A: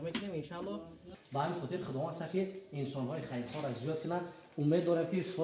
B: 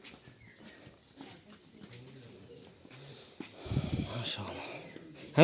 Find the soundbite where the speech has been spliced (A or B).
A